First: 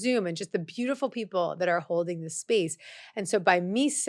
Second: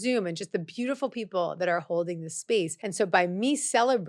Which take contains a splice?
second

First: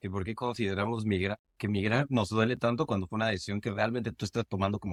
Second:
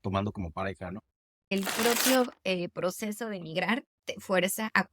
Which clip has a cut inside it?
second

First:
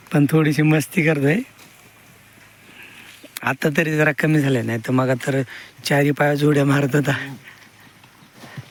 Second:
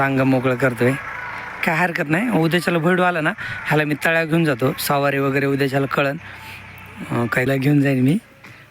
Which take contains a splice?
second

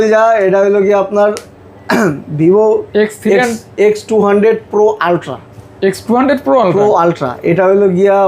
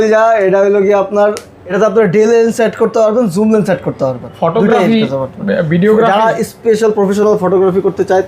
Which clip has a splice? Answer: second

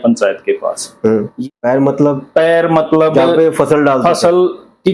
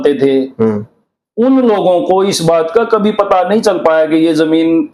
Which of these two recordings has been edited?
first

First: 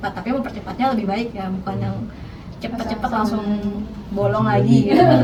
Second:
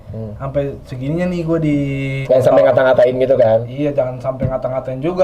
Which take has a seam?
second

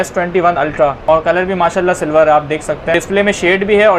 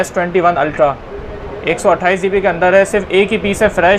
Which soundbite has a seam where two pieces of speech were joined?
first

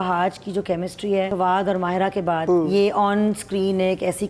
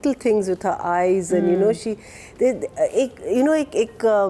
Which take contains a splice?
first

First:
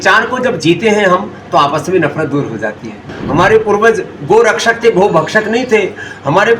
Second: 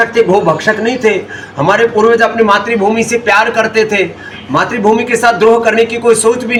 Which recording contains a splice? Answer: first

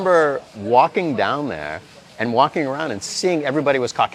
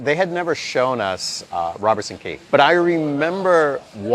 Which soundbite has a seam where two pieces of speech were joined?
second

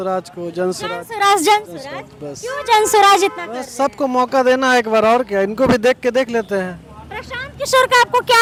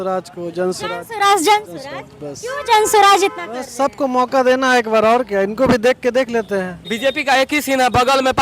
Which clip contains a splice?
second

